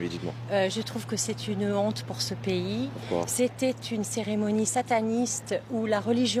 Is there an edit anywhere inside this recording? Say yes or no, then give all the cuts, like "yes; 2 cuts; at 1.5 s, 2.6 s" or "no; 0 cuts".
no; 0 cuts